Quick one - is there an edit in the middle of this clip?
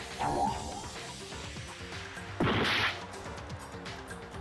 yes; 3 cuts; at 0.9 s, 2.4 s, 3.6 s

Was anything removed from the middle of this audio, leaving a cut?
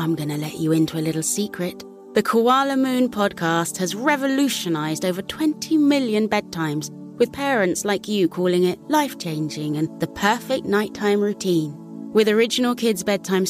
no; 0 cuts

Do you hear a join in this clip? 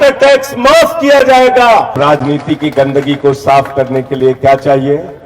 yes; 1 cut; at 1.9 s

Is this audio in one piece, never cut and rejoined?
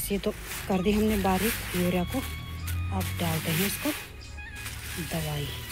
yes; 0 cuts

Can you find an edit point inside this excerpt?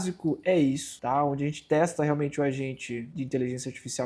no; 0 cuts

